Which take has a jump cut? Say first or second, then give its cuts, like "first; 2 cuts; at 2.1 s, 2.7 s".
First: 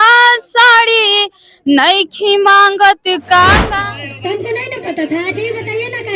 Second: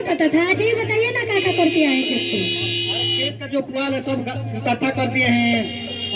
first; 1 cut; at 3.7 s